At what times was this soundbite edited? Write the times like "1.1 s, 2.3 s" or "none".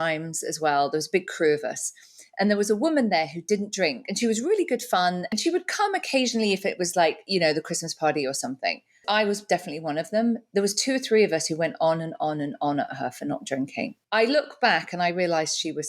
5.3 s, 9.0 s, 14.0 s